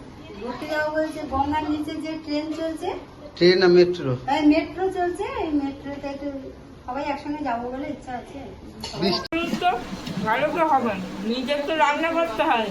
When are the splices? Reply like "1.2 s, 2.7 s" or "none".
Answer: 9.3 s